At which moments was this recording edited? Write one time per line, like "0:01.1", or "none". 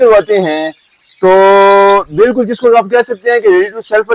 none